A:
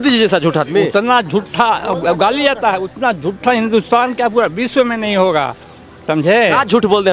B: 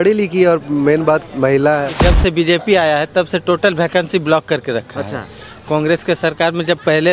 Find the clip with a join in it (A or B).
B